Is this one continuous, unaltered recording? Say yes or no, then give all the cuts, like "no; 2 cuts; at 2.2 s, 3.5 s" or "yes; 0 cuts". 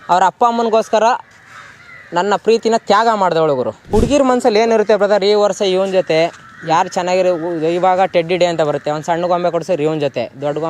no; 1 cut; at 3.8 s